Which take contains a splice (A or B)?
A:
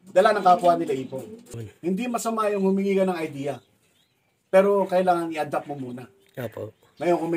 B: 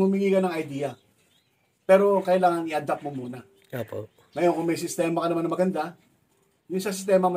A